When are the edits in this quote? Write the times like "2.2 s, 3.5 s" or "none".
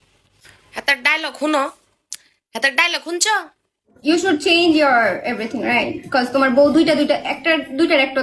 3.9 s

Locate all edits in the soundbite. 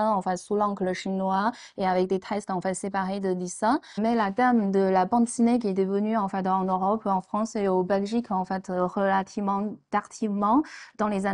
3.9 s

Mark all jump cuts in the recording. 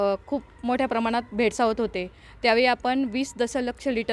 none

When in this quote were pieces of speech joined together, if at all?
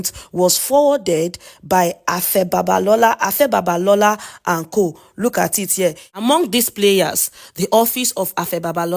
6.2 s

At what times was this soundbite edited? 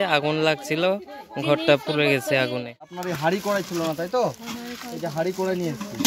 3.0 s

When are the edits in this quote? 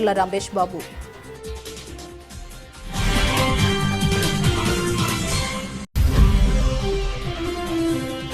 0.9 s, 6.0 s

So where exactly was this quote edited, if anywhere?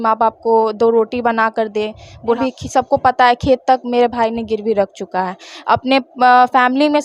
2.4 s

